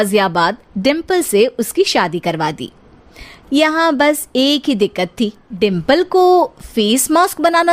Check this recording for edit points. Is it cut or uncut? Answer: cut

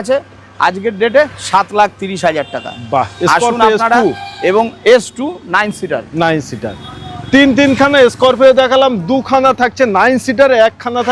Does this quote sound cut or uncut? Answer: uncut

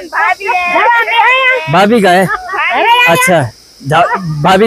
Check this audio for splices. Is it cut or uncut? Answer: uncut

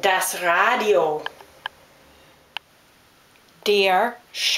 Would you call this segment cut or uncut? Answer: cut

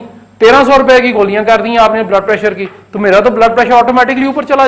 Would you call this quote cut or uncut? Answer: uncut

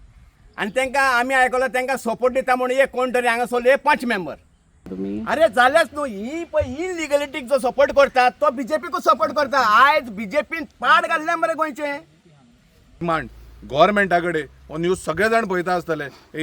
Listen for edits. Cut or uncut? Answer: cut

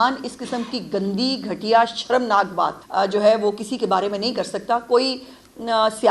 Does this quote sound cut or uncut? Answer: cut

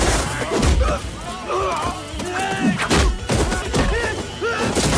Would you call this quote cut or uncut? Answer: cut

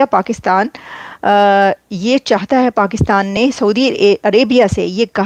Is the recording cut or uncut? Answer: uncut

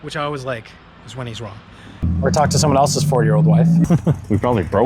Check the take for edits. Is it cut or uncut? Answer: cut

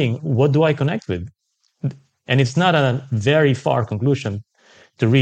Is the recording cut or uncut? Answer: uncut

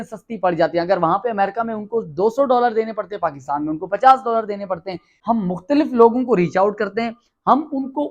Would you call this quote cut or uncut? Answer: cut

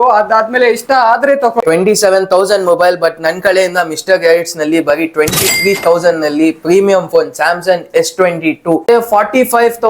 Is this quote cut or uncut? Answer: cut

